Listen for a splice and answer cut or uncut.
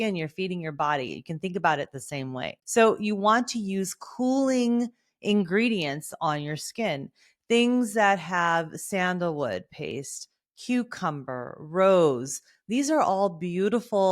cut